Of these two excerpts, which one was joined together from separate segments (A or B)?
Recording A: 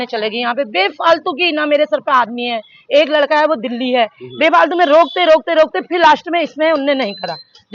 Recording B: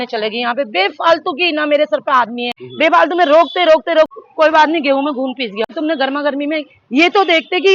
B